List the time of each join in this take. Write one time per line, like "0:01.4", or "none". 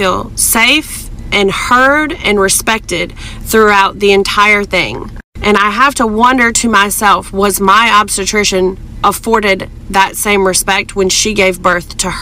none